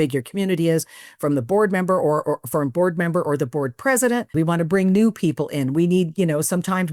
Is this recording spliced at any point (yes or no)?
yes